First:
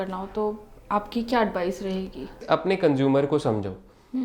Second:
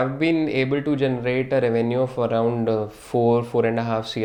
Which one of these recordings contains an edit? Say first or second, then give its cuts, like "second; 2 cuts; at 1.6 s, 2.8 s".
first; 1 cut; at 2.4 s